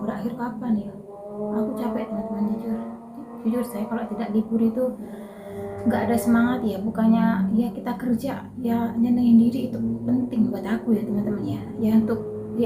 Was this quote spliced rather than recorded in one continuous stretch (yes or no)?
no